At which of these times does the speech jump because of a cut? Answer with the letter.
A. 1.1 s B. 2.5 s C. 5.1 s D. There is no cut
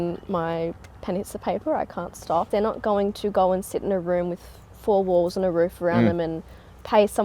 B